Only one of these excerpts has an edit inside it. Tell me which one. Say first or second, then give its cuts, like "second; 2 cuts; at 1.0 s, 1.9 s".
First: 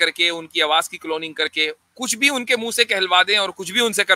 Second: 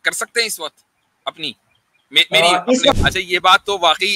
second; 1 cut; at 2.9 s